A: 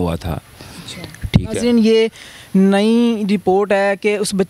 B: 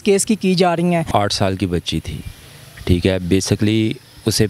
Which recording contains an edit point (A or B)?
B